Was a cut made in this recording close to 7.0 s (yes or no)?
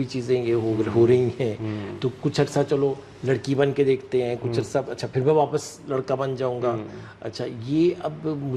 no